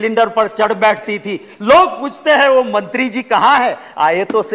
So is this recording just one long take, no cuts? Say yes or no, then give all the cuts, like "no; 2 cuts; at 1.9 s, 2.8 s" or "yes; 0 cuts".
yes; 0 cuts